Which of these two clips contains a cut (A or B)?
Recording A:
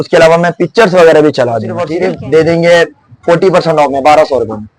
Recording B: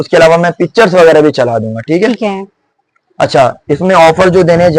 A